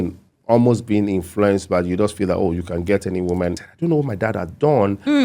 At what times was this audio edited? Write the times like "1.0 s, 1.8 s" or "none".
3.6 s